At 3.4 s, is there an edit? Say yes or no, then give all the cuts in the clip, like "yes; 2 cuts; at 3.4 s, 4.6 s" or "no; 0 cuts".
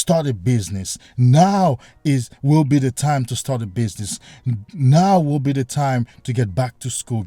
no; 0 cuts